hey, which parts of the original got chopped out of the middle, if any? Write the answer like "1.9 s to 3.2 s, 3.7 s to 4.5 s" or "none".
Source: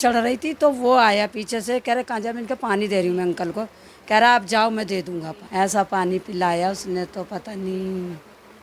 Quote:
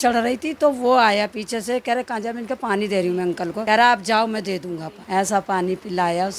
3.6 s to 4.0 s